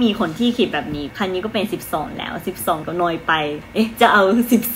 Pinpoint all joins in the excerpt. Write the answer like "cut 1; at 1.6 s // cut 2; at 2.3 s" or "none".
cut 1; at 1.1 s // cut 2; at 3.3 s